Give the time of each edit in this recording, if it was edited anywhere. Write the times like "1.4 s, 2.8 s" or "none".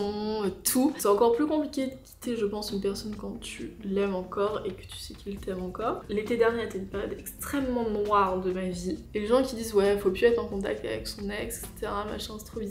1.0 s, 6.0 s, 9.1 s